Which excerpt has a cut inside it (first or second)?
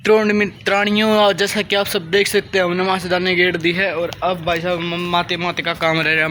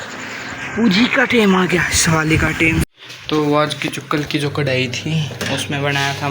second